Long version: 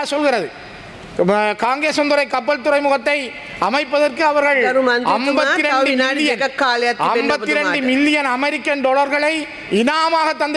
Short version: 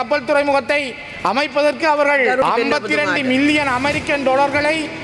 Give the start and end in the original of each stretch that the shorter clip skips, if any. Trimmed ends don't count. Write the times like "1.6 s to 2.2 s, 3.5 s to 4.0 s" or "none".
4.8 s to 7.0 s